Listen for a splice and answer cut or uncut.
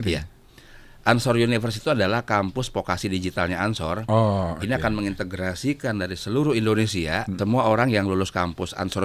cut